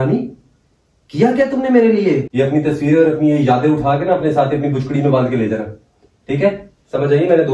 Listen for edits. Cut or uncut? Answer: cut